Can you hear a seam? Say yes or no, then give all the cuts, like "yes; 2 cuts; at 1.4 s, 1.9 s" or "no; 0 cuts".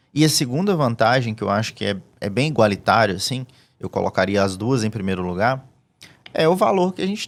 no; 0 cuts